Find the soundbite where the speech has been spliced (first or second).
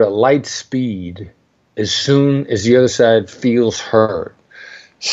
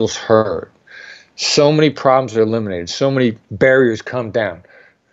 second